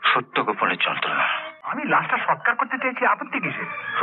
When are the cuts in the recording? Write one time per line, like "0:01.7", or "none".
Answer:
0:01.7

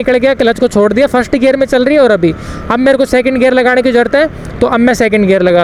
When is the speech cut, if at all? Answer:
none

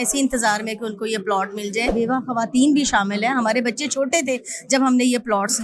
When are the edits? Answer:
0:01.9

